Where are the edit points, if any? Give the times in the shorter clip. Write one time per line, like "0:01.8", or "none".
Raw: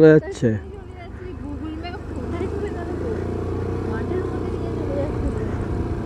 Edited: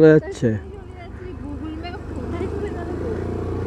none